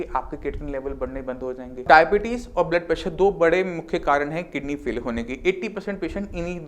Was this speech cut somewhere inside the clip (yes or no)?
yes